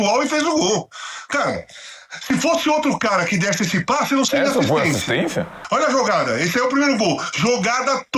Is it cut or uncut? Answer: cut